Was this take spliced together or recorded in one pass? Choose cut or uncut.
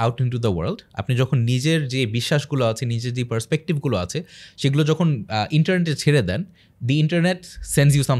uncut